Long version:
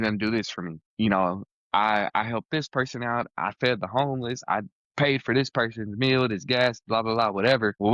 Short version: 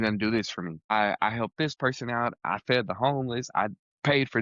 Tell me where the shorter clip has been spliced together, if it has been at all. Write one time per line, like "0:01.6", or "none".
0:00.9

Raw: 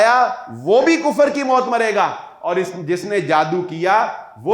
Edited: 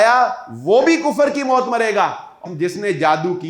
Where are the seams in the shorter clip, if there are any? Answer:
0:02.4

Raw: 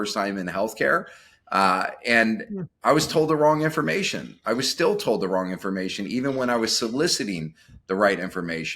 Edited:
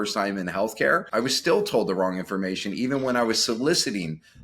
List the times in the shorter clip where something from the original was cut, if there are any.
0:01.1

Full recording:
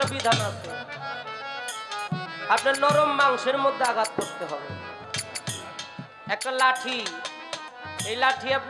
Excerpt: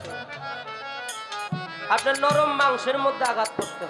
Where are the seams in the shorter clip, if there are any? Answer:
none

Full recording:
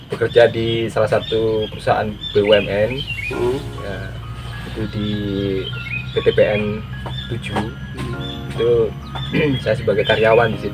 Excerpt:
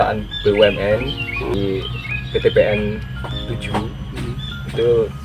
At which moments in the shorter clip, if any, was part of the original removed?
0:01.5

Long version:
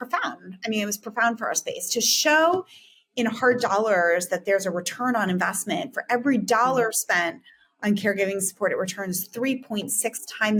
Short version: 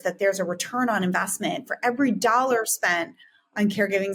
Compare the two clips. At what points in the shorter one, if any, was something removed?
none

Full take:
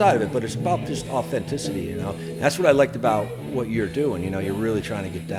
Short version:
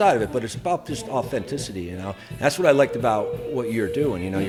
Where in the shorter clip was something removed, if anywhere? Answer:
none

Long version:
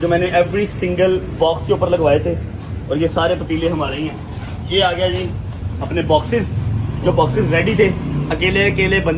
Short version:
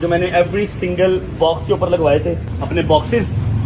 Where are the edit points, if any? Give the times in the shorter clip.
0:02.5

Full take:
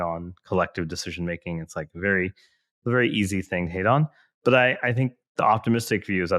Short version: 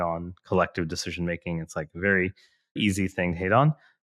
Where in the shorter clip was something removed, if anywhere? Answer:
0:02.8

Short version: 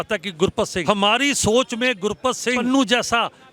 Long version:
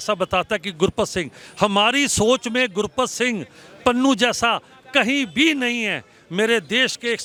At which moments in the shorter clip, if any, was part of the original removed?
0:00.8
0:02.6

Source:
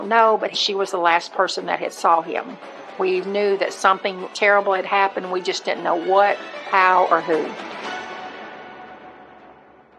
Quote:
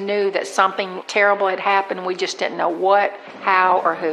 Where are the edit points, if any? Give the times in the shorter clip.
none

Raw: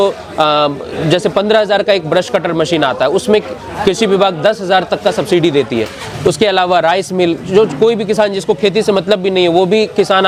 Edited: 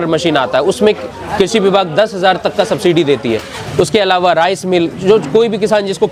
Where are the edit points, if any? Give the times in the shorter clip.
none

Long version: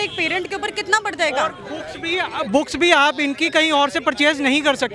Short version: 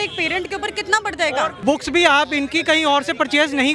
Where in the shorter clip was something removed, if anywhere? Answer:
0:01.6

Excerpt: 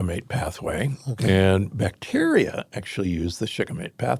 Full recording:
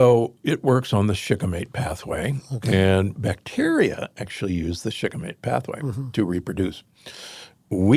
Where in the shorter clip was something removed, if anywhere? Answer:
none

